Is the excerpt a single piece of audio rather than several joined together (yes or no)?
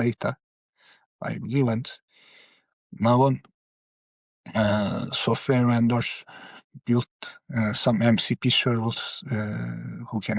yes